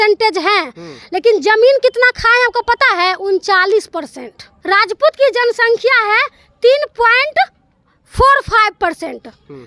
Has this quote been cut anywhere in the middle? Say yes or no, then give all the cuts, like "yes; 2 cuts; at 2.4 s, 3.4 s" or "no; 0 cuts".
yes; 1 cut; at 4.5 s